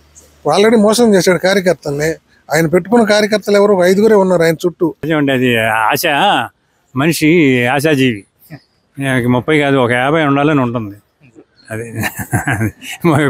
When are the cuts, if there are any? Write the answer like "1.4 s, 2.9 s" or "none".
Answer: 5.0 s